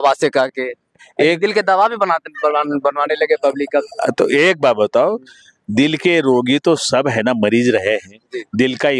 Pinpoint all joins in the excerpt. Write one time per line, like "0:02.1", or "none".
none